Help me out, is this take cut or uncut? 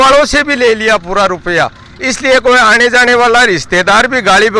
uncut